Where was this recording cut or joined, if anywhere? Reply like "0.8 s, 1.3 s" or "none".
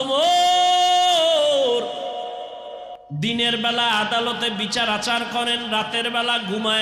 2.9 s